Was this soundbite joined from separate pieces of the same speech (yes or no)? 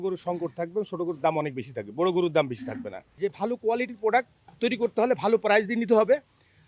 yes